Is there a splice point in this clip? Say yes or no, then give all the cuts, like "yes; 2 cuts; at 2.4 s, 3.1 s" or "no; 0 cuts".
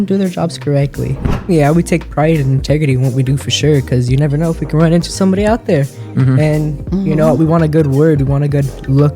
yes; 1 cut; at 1.3 s